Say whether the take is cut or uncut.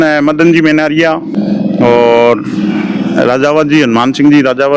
cut